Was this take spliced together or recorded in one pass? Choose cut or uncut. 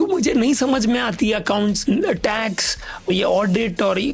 cut